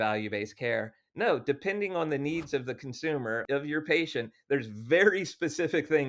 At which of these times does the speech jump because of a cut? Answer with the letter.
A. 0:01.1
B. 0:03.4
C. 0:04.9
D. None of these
B